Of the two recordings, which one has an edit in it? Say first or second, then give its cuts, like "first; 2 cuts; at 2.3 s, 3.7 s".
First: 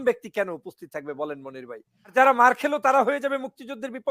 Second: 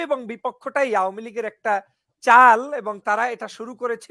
first; 1 cut; at 2.1 s